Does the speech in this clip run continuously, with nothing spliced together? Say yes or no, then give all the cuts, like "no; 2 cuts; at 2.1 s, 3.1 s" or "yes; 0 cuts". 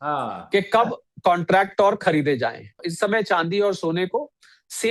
no; 1 cut; at 2.8 s